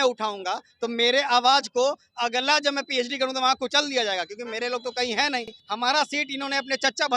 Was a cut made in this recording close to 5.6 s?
yes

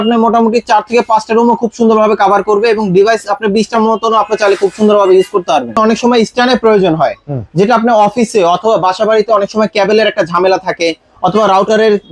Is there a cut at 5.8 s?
yes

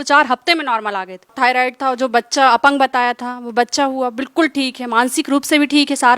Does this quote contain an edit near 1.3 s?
yes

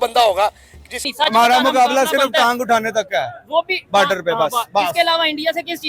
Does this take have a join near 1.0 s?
yes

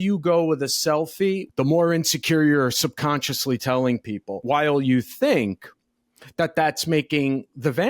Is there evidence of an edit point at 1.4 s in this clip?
yes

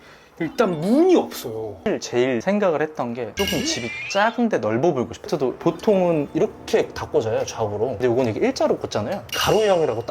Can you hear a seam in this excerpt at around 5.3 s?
yes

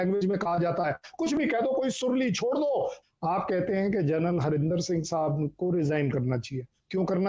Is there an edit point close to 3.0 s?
yes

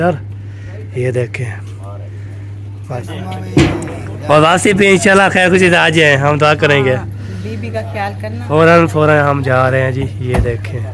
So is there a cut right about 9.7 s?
no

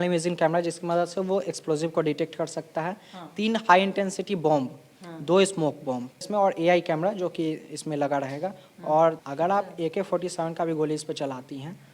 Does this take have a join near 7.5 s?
no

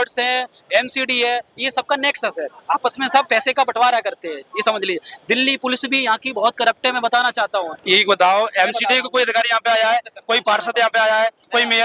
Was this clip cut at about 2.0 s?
no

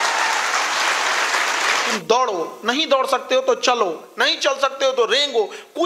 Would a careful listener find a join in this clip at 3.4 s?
no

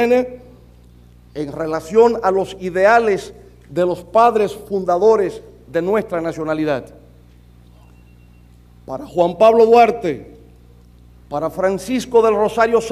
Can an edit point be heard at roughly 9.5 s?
yes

